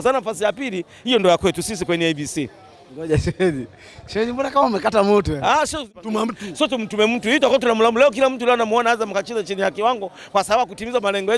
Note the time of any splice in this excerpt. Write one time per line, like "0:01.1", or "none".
0:06.0